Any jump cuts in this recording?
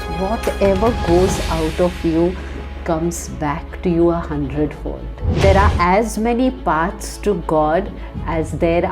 yes; 1 cut; at 5.4 s

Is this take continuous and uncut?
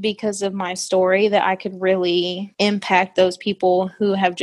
yes; 0 cuts

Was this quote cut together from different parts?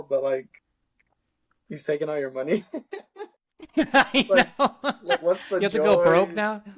no; 0 cuts

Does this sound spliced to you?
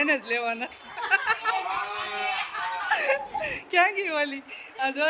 no; 0 cuts

